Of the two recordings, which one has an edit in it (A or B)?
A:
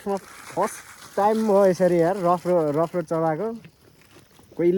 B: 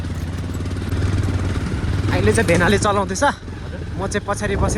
B